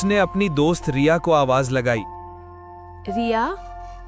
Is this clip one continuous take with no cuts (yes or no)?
no